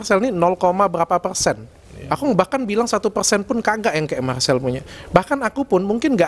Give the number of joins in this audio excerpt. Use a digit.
0